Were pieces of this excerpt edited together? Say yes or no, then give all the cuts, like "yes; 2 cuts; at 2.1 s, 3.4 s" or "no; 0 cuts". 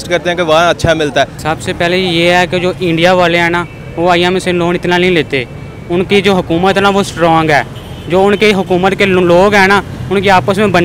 yes; 1 cut; at 1.4 s